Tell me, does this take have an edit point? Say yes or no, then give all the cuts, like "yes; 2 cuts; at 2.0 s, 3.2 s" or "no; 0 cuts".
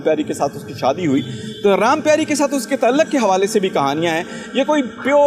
no; 0 cuts